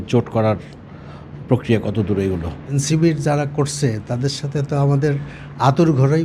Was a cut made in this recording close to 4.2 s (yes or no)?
no